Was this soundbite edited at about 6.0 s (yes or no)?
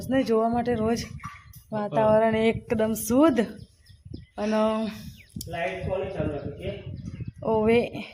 no